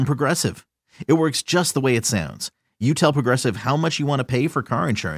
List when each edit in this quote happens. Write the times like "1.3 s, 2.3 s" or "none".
none